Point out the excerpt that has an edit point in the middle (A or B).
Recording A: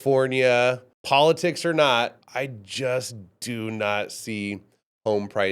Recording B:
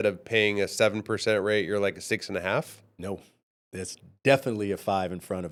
A